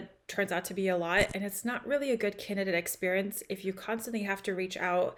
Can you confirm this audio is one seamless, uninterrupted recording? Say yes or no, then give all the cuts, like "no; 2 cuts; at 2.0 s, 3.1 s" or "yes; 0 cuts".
yes; 0 cuts